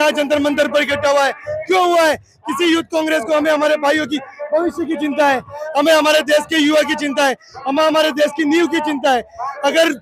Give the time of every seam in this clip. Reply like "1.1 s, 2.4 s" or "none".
none

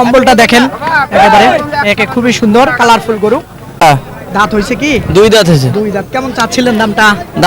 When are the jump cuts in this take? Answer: 3.8 s

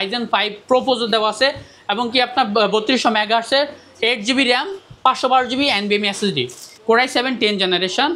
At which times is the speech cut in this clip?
6.7 s

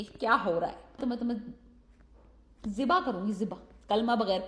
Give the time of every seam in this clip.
1.0 s

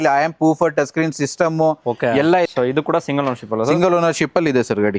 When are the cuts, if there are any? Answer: 2.5 s

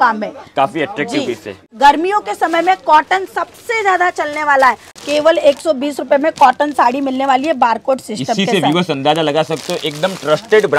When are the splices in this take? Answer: 1.5 s, 5.0 s

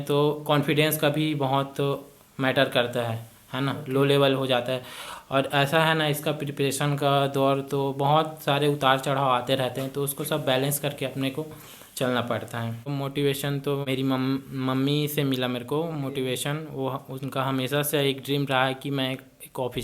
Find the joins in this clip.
12.9 s, 13.9 s

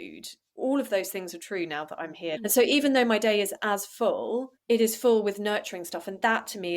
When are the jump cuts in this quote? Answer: 2.4 s

